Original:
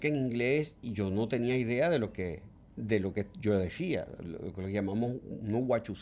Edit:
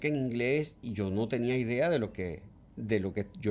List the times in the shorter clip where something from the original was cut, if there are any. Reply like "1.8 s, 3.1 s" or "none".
none